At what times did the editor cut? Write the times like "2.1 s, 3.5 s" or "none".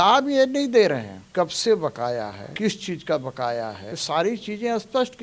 1.2 s, 2.4 s, 3.9 s